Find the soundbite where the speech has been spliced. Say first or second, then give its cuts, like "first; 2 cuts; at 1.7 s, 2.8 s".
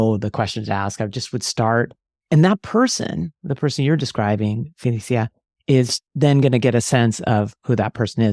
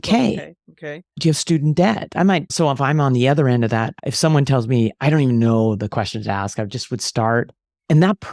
second; 2 cuts; at 2.5 s, 4.0 s